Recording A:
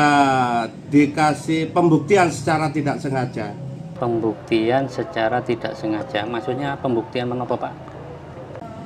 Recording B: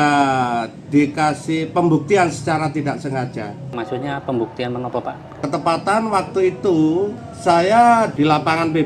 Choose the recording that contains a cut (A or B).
B